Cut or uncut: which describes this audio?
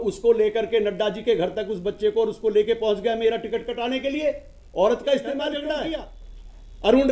cut